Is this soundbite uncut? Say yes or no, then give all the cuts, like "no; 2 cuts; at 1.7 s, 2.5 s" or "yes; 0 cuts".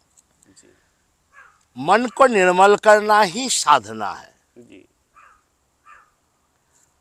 yes; 0 cuts